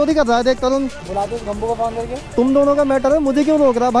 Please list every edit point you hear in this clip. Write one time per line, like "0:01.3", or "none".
0:01.0
0:02.3

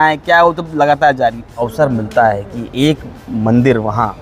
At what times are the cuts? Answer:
0:01.7

